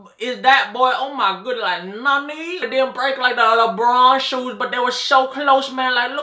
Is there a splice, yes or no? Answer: yes